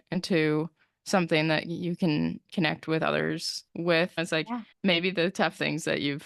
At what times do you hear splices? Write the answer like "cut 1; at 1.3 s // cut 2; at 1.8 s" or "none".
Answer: cut 1; at 4.2 s